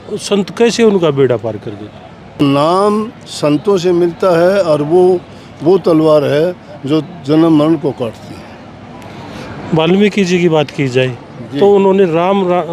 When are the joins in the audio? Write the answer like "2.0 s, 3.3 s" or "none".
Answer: 2.4 s